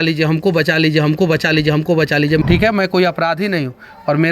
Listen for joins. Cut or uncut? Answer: cut